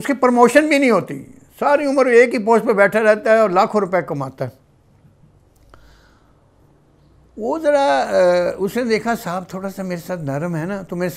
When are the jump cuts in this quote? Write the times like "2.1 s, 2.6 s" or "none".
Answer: none